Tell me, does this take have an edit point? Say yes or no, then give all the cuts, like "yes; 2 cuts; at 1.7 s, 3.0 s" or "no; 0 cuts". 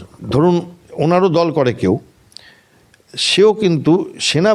no; 0 cuts